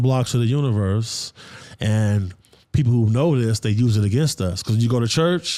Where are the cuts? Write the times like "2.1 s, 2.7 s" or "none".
none